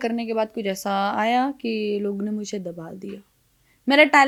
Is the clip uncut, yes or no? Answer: yes